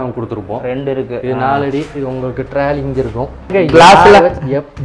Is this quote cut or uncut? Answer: cut